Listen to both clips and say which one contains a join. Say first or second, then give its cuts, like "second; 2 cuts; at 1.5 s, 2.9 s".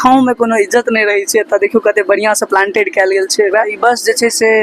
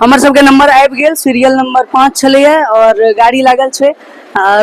first; 1 cut; at 3.7 s